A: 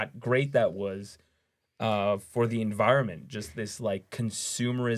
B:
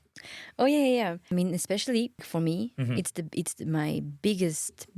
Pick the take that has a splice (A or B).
B